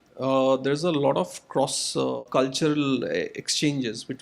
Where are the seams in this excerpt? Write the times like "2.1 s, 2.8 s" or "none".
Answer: 2.2 s